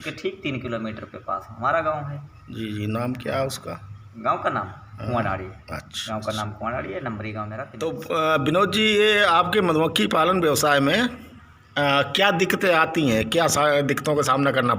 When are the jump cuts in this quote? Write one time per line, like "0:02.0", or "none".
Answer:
0:07.6